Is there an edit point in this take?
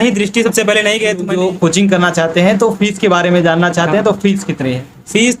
yes; 1 cut; at 1.3 s

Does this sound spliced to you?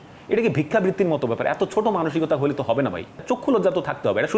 yes; 1 cut; at 3.2 s

